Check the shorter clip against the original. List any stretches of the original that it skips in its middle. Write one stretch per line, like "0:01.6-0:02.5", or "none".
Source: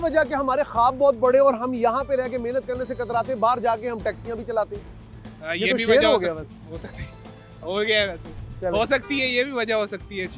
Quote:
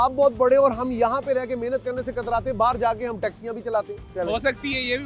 0:04.8-0:08.5